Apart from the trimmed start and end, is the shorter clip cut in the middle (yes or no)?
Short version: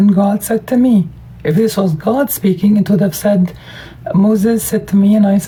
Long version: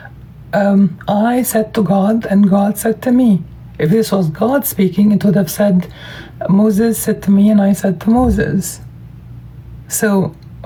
no